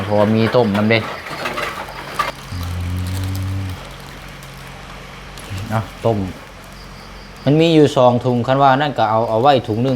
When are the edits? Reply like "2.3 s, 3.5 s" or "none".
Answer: 2.3 s